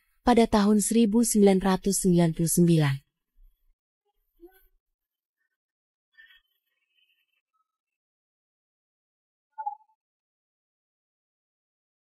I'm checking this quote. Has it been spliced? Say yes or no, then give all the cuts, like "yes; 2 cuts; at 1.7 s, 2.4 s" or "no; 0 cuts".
no; 0 cuts